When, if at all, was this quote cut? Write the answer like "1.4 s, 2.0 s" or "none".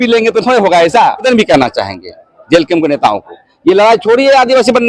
1.2 s